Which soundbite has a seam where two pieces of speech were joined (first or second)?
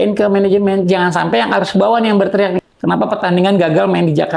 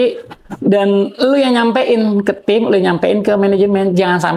first